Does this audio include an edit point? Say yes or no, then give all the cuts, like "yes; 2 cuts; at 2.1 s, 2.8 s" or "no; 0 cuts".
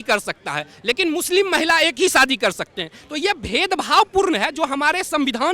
no; 0 cuts